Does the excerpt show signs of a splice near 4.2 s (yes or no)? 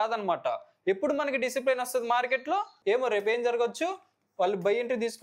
no